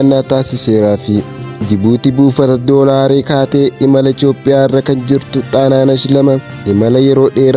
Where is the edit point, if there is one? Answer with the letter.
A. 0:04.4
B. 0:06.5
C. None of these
B